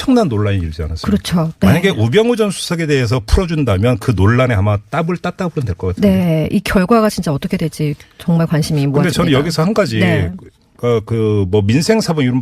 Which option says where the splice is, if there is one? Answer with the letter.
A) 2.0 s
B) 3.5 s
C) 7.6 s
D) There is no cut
A